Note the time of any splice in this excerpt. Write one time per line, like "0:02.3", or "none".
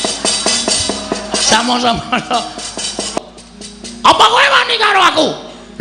0:03.2